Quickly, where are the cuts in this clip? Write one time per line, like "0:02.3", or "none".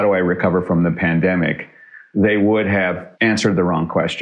0:03.1